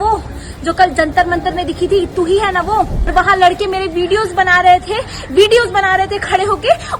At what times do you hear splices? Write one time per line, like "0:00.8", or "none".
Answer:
0:03.1